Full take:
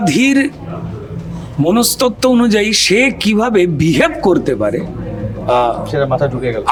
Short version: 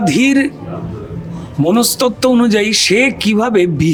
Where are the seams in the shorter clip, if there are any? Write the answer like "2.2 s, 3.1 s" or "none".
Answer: none